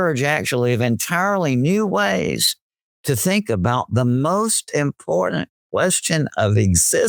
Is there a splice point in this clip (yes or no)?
no